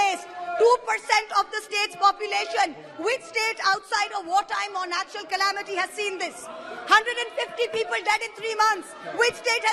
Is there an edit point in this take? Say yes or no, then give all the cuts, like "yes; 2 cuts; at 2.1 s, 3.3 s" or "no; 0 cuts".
no; 0 cuts